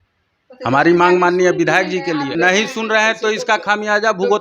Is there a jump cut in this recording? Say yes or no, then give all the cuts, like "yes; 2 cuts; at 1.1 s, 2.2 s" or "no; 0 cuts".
yes; 1 cut; at 2.3 s